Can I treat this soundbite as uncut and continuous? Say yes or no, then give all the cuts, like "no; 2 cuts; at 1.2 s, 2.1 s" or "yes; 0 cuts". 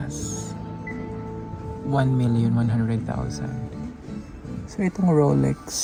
yes; 0 cuts